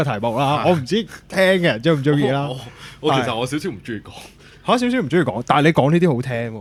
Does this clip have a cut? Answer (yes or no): no